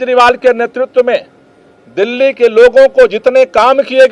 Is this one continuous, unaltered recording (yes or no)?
yes